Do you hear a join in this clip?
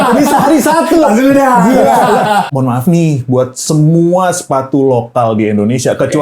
yes; 1 cut; at 2.5 s

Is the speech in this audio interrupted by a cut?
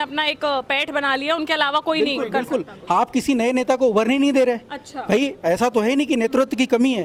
no; 0 cuts

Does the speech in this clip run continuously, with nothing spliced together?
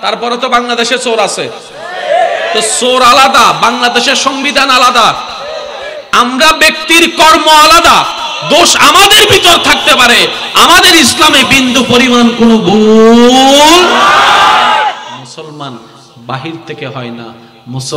no; 1 cut; at 15.3 s

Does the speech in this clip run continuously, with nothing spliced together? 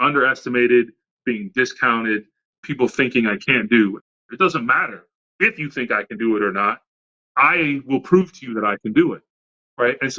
no; 1 cut; at 4.0 s

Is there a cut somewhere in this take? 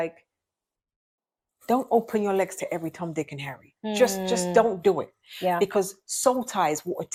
no; 0 cuts

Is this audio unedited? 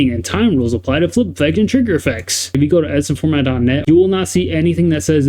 no; 2 cuts; at 2.6 s, 3.8 s

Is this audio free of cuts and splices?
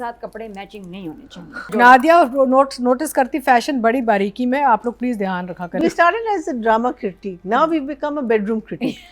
no; 2 cuts; at 1.7 s, 5.8 s

